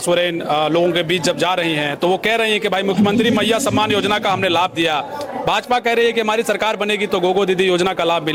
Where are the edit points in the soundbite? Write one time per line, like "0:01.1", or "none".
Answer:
none